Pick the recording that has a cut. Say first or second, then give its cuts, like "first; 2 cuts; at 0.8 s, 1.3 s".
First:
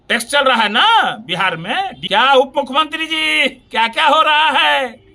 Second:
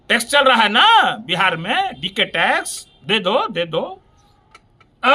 first; 1 cut; at 2.0 s